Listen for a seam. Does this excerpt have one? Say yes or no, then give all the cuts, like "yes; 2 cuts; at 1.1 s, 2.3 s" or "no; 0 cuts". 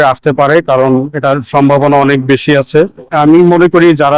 yes; 1 cut; at 3.1 s